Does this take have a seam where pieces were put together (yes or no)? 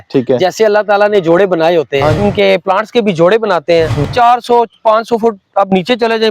yes